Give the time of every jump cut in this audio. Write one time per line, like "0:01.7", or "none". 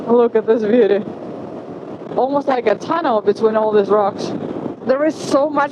0:04.8